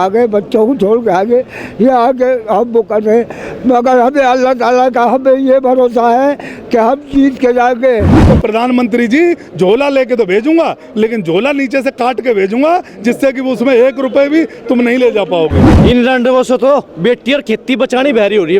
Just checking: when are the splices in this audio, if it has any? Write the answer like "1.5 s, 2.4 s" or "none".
8.2 s, 15.6 s